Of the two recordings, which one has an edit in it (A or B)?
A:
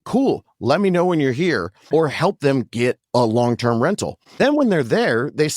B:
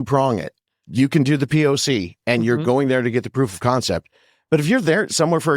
A